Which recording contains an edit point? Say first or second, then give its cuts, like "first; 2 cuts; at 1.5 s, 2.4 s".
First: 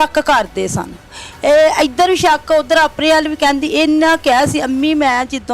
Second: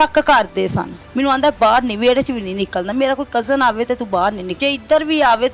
second; 2 cuts; at 1.0 s, 4.5 s